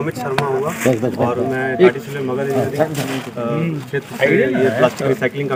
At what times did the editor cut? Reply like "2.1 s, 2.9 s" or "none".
none